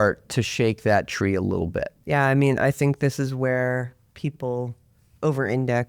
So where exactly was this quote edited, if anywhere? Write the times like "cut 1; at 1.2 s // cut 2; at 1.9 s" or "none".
cut 1; at 2.0 s